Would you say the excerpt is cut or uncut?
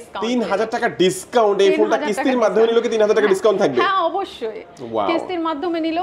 uncut